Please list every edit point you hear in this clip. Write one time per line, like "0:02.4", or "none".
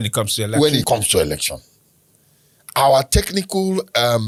none